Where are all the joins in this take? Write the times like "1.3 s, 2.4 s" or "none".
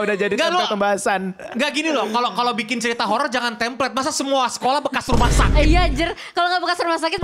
none

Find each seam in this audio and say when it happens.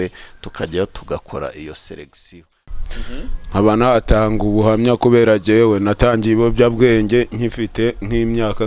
2.6 s

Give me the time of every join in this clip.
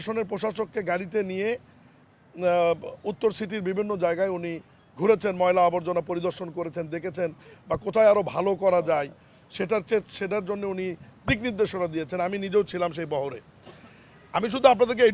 none

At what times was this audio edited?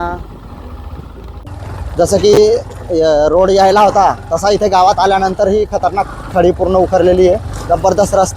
1.4 s

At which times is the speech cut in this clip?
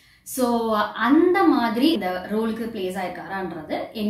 2.0 s

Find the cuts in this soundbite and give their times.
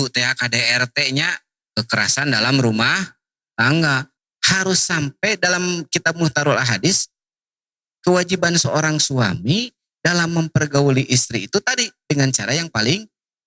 4.1 s

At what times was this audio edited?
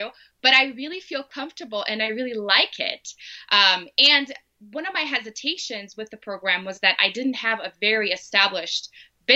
none

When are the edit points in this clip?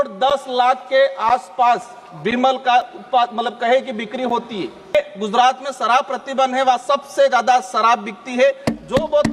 4.9 s

